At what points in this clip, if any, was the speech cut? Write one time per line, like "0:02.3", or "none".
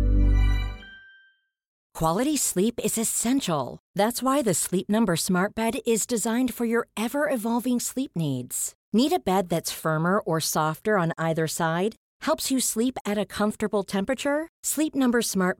0:01.8